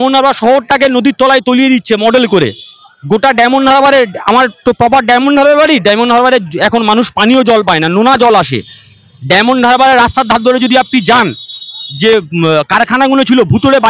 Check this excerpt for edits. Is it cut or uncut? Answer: uncut